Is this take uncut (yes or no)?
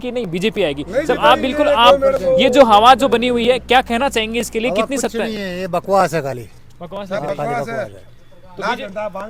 yes